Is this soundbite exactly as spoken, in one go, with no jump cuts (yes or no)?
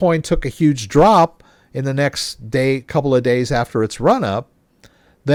yes